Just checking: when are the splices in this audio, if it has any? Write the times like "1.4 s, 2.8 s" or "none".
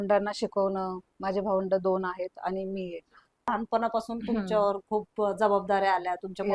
3.5 s